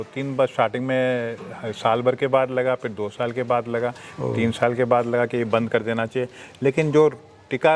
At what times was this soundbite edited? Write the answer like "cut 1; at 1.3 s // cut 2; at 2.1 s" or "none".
none